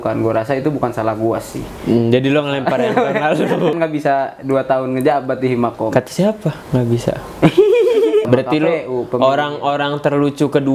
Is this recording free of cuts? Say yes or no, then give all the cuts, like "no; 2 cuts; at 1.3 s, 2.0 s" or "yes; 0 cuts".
no; 2 cuts; at 3.8 s, 8.3 s